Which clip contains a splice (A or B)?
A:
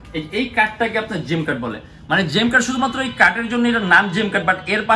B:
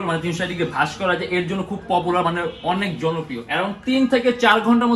B